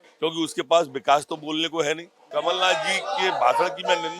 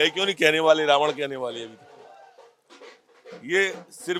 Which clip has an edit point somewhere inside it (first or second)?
first